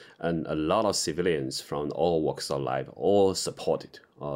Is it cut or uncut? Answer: uncut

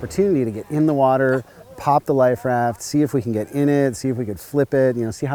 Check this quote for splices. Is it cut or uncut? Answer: uncut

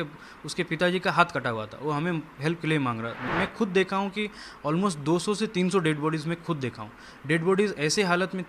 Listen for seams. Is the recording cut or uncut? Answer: cut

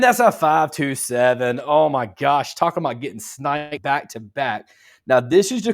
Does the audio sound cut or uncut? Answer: uncut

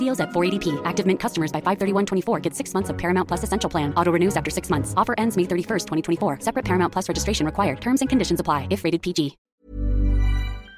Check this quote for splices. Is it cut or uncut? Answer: cut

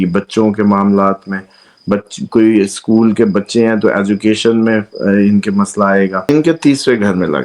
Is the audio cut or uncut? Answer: cut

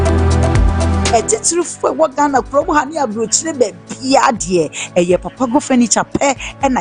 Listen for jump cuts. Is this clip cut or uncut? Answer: cut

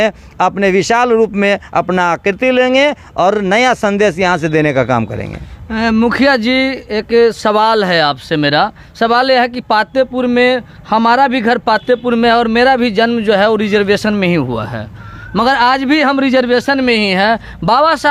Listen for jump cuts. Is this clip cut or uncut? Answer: uncut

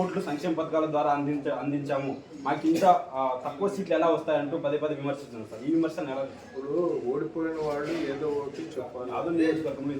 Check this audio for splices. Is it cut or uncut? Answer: cut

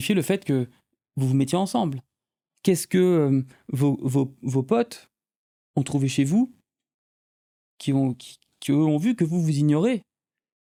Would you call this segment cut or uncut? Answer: uncut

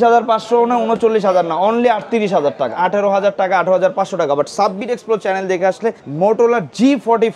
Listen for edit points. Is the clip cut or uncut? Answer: cut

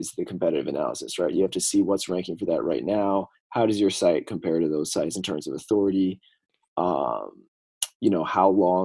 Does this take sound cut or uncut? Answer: uncut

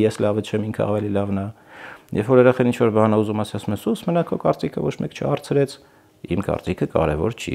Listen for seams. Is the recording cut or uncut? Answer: uncut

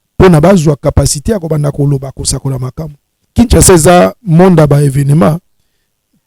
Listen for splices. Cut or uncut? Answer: cut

